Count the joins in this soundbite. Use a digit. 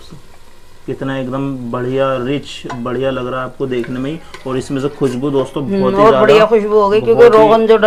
0